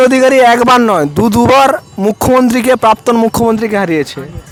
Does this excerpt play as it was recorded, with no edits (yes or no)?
yes